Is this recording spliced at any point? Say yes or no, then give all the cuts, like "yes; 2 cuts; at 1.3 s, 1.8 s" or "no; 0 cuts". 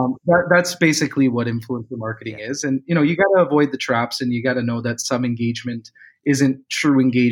no; 0 cuts